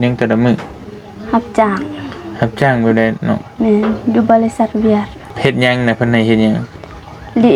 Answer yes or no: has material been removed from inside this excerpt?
yes